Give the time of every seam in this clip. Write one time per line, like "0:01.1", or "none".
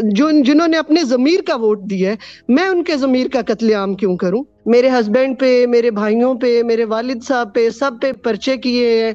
0:04.5
0:08.2